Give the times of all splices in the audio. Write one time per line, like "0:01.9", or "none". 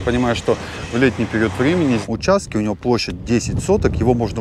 0:02.0